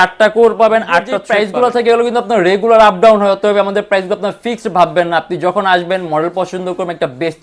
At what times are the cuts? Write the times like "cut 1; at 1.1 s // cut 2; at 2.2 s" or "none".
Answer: cut 1; at 1.2 s